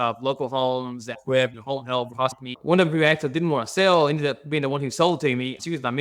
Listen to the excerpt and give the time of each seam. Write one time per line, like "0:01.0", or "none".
0:02.5